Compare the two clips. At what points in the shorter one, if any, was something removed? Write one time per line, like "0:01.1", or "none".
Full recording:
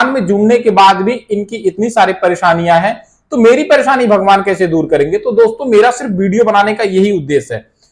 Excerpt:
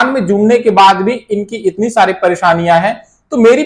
none